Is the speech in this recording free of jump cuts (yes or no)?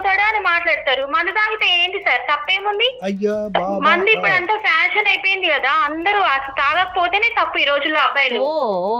yes